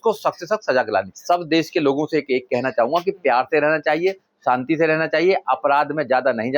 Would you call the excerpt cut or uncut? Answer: cut